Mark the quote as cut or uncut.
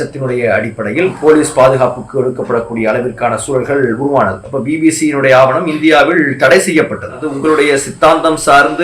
cut